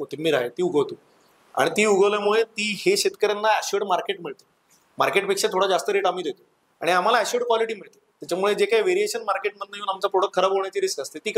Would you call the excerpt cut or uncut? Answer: uncut